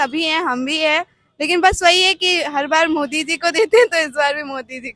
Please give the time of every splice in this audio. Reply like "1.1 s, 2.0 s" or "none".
none